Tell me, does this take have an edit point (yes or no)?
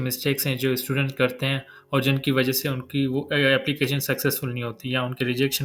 no